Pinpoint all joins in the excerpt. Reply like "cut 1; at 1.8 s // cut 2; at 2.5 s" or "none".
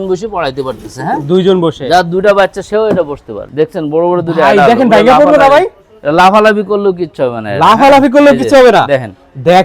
cut 1; at 3.4 s